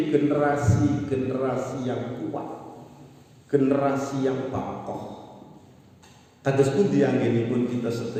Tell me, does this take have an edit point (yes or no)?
no